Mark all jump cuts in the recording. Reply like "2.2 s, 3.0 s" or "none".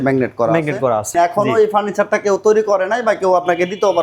1.1 s